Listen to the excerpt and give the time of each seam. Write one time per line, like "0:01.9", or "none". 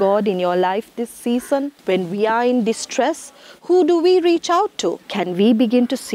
0:01.8
0:05.1